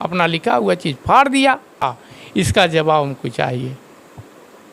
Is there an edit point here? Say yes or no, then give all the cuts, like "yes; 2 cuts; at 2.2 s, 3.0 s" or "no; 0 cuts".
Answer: yes; 1 cut; at 1.8 s